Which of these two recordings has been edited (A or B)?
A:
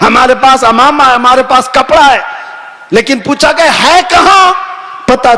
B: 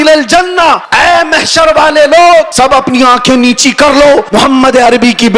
B